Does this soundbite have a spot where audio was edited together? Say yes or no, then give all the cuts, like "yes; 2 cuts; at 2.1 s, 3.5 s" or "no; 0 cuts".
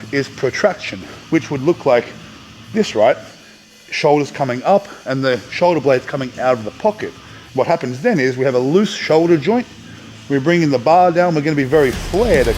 no; 0 cuts